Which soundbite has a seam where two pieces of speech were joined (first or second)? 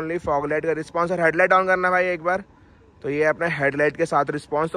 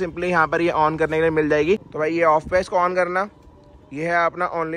second